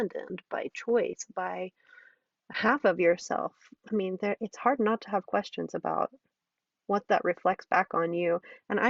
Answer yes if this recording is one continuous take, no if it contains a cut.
yes